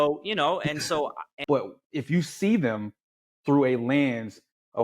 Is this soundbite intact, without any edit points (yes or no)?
no